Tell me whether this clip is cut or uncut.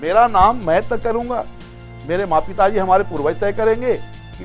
uncut